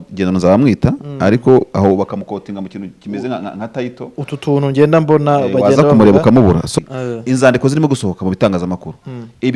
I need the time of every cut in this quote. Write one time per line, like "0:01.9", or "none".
0:06.7